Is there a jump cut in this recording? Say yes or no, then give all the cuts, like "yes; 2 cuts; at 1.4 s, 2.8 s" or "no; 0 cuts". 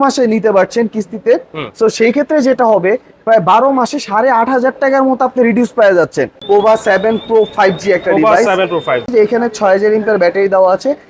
yes; 2 cuts; at 6.3 s, 9.1 s